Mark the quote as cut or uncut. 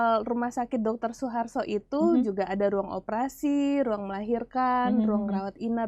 uncut